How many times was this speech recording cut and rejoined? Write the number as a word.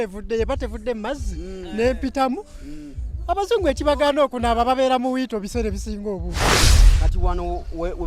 one